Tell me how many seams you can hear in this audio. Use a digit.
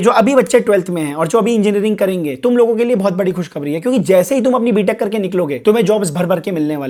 0